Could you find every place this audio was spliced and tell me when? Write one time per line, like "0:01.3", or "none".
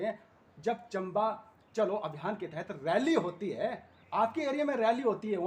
none